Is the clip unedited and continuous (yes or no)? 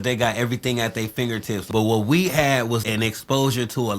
no